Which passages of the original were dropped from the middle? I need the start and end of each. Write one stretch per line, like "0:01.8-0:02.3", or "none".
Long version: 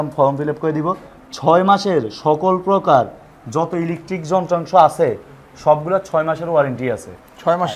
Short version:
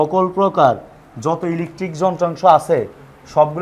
none